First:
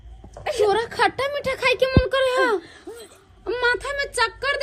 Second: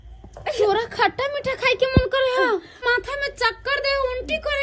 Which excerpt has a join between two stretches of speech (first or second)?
second